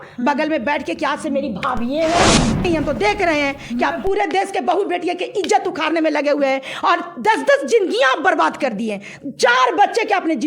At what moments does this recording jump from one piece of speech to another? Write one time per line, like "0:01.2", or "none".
0:02.6